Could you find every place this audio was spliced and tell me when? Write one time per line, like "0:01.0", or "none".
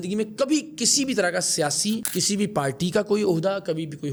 none